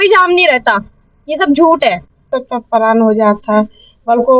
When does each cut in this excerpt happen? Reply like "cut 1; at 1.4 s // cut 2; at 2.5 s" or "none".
cut 1; at 2.3 s